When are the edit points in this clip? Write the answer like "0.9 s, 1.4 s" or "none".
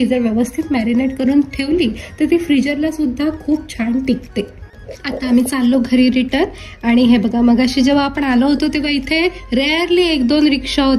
none